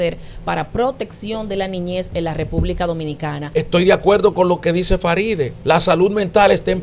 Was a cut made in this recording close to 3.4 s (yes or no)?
yes